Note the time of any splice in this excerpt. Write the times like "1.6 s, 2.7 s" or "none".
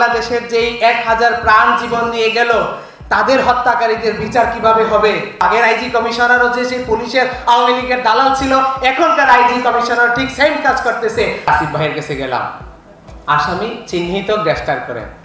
5.4 s, 11.5 s